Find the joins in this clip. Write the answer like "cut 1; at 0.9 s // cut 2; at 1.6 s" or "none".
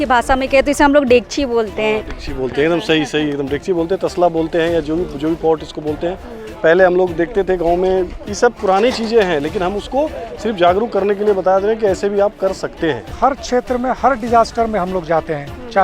cut 1; at 13.1 s

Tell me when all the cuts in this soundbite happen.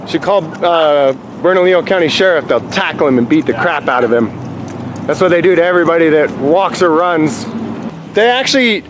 cut 1; at 7.9 s

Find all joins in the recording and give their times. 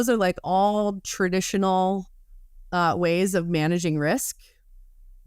none

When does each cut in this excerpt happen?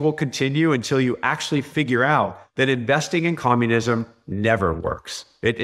none

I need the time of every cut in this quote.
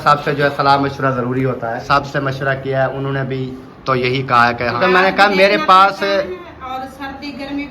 cut 1; at 1.8 s // cut 2; at 4.8 s

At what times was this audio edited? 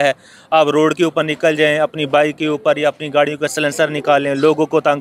none

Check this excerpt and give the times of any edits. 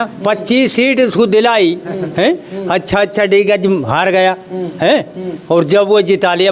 none

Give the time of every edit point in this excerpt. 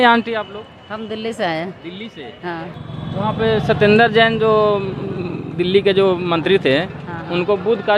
none

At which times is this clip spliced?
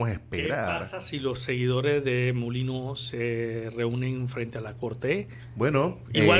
cut 1; at 5.4 s

